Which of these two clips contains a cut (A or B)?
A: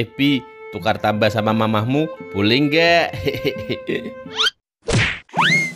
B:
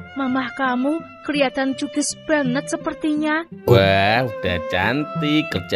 B